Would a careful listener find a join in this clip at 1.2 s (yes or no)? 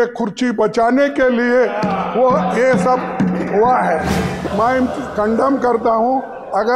no